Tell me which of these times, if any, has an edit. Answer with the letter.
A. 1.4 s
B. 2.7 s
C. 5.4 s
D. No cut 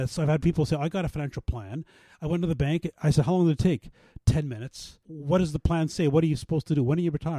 D